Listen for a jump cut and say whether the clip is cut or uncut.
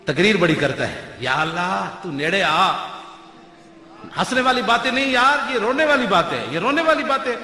uncut